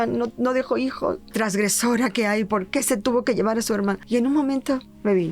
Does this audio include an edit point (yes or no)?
yes